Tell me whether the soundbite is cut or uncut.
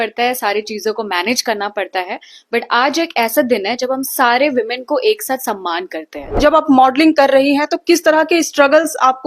cut